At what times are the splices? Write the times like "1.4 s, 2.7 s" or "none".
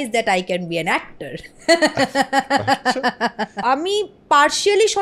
3.6 s